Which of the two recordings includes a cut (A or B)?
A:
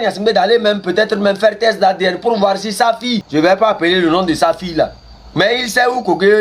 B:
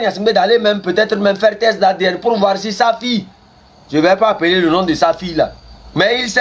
A